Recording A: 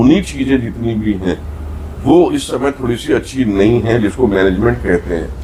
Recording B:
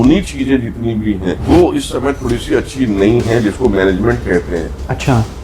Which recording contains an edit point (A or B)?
B